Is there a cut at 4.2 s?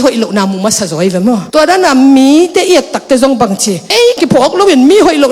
yes; 1 cut; at 4.2 s

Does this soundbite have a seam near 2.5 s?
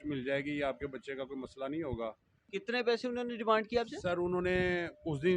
yes; 1 cut; at 2.5 s

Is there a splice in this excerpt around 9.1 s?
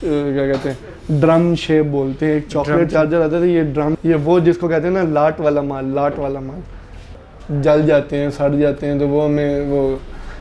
no; 2 cuts; at 4.0 s, 7.1 s

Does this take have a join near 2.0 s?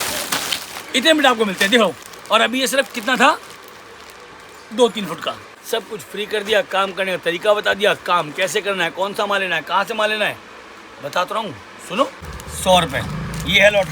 yes; 3 cuts; at 2.0 s, 5.5 s, 12.3 s

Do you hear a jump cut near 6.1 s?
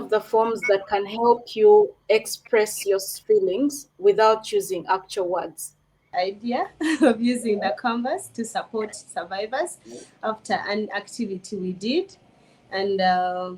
yes; 1 cut; at 6.1 s

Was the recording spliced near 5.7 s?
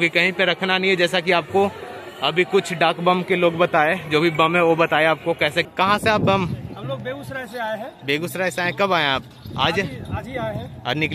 yes; 1 cut; at 5.7 s

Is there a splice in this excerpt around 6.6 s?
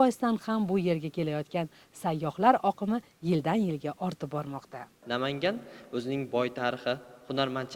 no; 1 cut; at 4.9 s

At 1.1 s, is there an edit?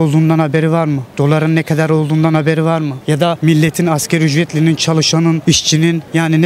yes; 3 cuts; at 1.1 s, 3.3 s, 5.7 s

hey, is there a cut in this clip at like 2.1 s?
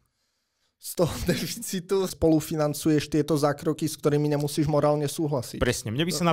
yes; 1 cut; at 2.1 s

